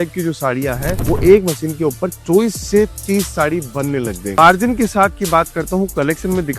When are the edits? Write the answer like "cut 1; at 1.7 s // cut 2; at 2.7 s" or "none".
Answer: cut 1; at 4.4 s